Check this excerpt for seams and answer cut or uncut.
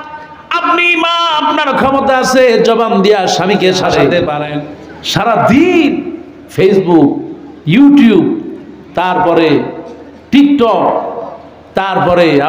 cut